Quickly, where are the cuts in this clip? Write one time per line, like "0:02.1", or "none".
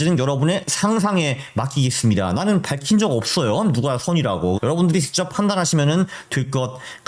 0:04.6